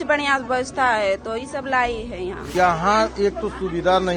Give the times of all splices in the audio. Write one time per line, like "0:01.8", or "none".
0:02.5

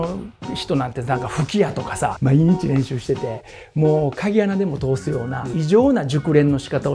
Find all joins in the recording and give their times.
0:02.2
0:05.5

